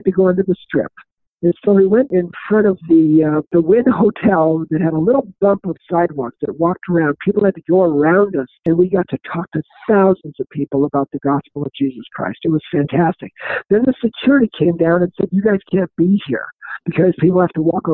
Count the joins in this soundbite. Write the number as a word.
three